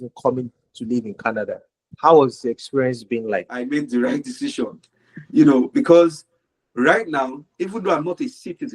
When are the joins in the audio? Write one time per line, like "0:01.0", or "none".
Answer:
0:03.6